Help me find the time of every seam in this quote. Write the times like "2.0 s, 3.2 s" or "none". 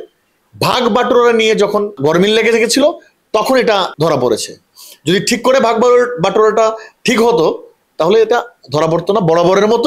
1.9 s, 3.9 s